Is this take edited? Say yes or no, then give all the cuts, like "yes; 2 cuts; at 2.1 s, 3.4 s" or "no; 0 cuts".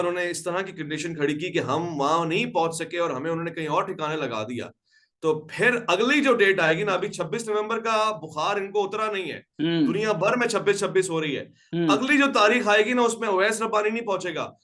no; 0 cuts